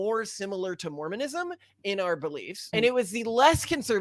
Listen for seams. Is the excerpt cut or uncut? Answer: cut